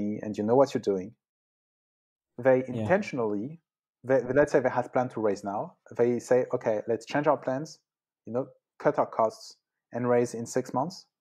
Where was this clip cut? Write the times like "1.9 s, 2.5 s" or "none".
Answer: none